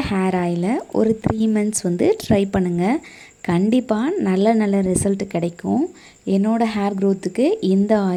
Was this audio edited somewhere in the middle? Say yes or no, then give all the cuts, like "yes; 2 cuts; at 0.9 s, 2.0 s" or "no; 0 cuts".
no; 0 cuts